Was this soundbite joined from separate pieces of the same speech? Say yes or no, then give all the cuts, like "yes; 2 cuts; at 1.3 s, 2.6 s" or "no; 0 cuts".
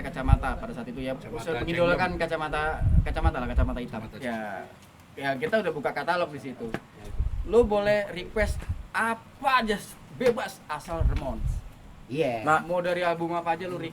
yes; 1 cut; at 4.1 s